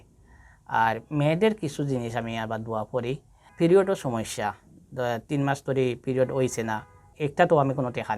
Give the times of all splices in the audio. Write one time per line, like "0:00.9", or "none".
0:07.1

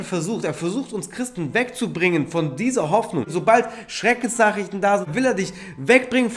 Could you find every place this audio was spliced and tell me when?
0:03.3
0:05.1

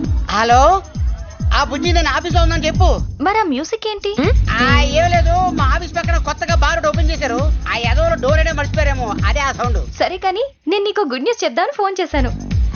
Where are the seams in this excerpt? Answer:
none

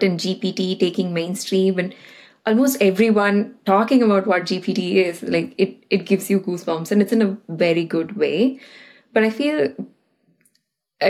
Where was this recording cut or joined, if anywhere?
none

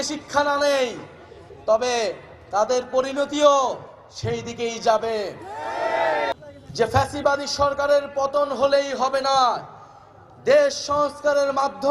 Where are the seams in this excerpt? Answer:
0:06.3

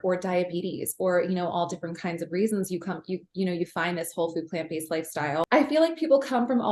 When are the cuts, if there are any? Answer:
0:05.5

